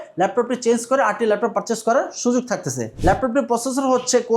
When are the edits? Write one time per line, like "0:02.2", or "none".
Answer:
0:02.9